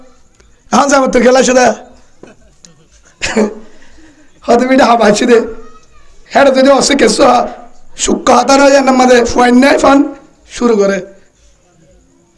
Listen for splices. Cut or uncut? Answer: uncut